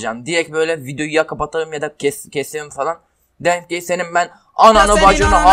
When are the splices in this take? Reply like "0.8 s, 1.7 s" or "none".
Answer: none